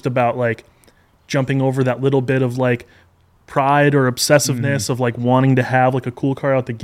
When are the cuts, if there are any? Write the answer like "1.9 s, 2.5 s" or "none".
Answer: none